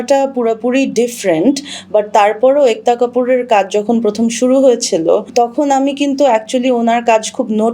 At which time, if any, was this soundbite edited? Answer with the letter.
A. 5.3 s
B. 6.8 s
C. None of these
A